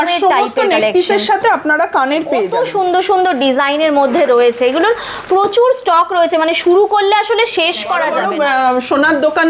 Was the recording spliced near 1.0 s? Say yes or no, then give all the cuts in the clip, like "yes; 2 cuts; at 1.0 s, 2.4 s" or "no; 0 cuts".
no; 2 cuts; at 2.5 s, 8.1 s